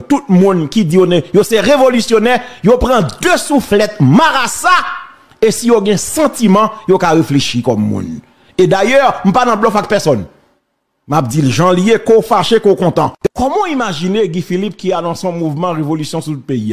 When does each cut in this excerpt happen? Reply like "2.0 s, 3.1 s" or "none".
13.3 s